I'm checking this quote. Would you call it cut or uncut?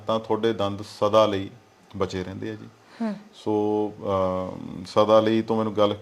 uncut